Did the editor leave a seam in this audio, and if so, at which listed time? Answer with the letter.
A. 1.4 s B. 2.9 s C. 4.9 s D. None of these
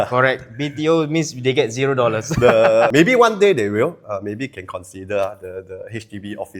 B